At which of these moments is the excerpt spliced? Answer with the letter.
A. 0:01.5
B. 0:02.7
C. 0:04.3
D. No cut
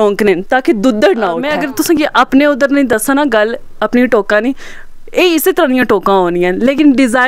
A